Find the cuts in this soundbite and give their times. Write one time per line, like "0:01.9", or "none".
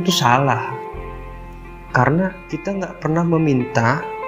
0:02.7